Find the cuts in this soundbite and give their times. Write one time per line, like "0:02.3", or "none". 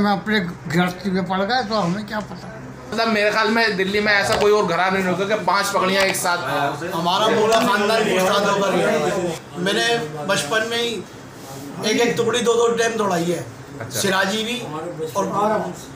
0:02.9
0:09.4